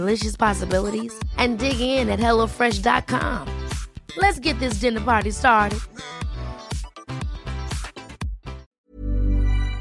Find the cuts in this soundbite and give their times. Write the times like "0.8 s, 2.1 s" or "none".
8.8 s